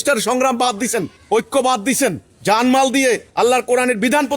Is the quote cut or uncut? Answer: cut